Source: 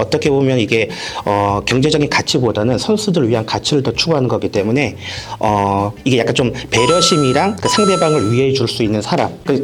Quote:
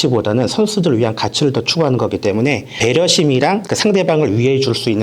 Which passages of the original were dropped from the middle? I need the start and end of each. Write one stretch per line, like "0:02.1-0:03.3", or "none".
0:05.0-0:06.6